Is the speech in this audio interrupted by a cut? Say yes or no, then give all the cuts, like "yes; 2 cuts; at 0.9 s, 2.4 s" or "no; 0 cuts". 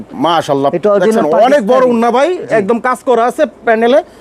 no; 0 cuts